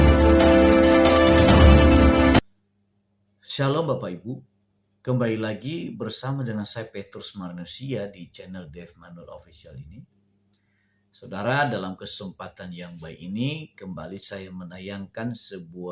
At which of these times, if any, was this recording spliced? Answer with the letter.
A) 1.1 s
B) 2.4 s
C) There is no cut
B